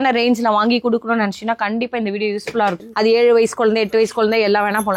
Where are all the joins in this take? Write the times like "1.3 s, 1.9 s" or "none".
2.8 s